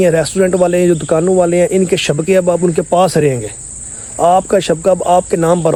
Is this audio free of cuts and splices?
yes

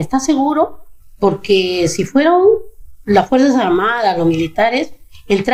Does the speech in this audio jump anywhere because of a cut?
no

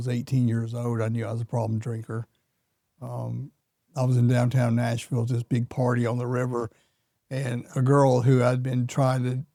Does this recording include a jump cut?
no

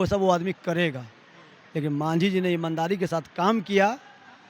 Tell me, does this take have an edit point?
no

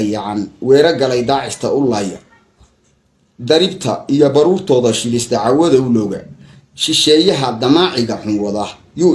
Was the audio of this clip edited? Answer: no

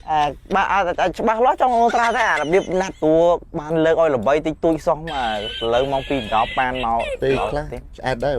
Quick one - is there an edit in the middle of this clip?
yes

